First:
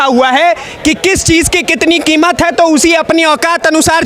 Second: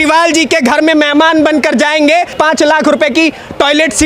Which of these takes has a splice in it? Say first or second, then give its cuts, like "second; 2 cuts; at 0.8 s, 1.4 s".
second; 1 cut; at 2.3 s